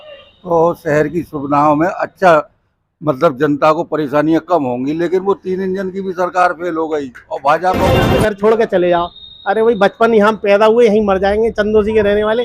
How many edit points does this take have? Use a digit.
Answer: 1